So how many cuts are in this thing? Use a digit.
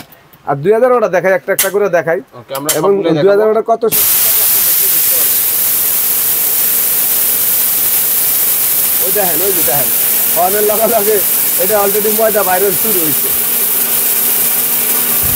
0